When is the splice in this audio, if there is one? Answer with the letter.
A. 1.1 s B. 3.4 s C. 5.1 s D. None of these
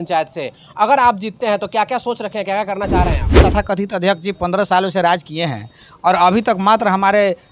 B